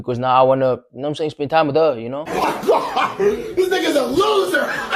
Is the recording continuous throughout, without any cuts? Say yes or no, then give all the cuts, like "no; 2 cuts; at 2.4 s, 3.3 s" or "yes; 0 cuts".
yes; 0 cuts